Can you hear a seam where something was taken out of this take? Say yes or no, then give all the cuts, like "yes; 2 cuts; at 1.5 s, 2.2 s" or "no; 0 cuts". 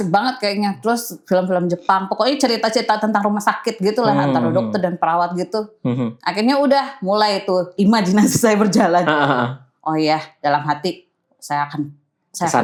no; 0 cuts